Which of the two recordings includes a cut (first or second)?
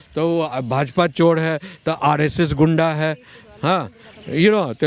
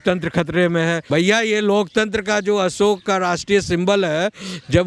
second